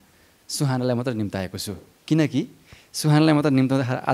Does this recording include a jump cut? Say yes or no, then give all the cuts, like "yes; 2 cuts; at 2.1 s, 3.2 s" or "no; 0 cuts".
no; 0 cuts